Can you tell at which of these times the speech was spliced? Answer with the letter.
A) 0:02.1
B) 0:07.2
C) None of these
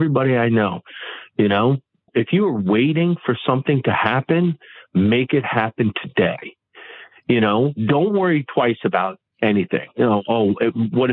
A